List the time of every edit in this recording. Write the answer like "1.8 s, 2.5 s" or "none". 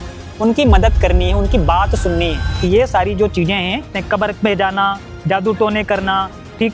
2.6 s, 4.0 s